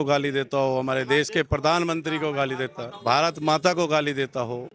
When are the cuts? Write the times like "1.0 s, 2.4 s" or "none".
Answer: 2.9 s